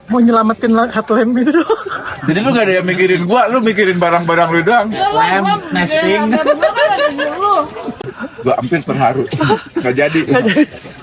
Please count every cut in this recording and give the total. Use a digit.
1